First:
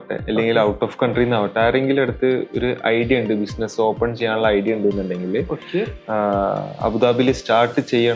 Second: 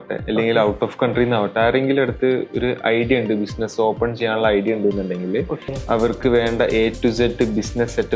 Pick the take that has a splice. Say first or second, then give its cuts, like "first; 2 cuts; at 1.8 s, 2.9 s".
second; 1 cut; at 5.6 s